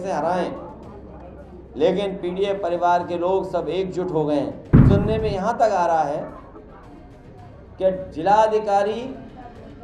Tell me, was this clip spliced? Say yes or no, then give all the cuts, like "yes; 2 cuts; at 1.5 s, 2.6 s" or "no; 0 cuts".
yes; 1 cut; at 4.7 s